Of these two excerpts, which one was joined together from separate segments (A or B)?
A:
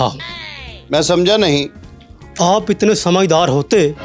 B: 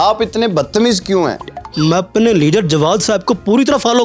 B